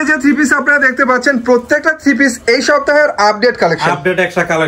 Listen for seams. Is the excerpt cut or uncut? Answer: uncut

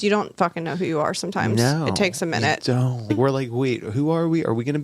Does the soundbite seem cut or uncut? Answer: cut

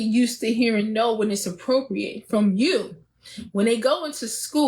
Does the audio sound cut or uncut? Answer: uncut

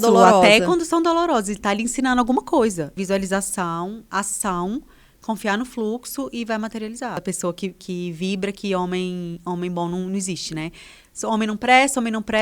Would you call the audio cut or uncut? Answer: cut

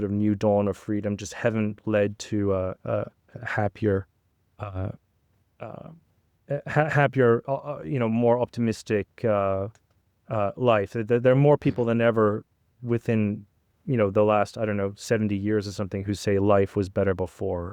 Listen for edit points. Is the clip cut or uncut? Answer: uncut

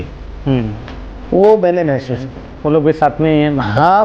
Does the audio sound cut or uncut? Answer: cut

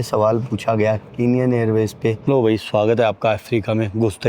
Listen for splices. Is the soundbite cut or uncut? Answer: cut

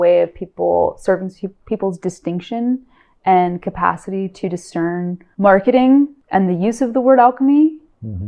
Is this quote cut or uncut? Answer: cut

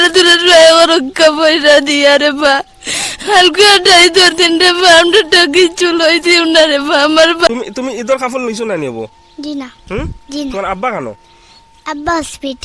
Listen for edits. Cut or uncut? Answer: cut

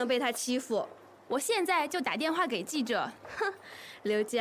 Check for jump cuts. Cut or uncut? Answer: uncut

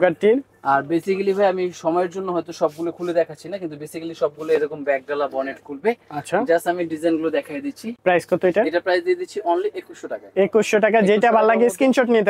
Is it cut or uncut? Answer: uncut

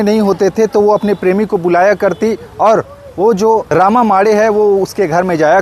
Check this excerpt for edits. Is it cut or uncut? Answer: uncut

